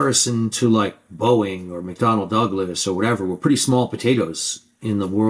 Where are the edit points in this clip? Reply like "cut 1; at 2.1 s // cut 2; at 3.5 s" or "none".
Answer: none